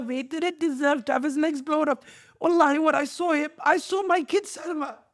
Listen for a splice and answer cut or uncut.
uncut